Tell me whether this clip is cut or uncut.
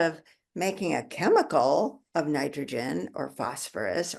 cut